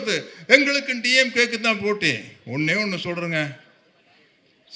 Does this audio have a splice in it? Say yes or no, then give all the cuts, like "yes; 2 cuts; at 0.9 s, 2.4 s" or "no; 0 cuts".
no; 0 cuts